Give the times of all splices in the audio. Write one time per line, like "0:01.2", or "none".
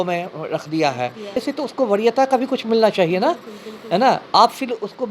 0:01.4